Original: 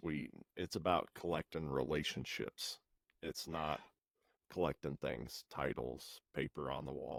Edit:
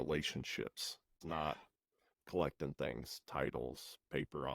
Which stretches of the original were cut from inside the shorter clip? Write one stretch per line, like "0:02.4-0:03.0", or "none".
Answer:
0:03.0-0:03.4